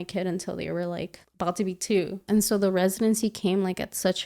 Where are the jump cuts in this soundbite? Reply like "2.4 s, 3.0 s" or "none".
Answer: 1.2 s, 2.2 s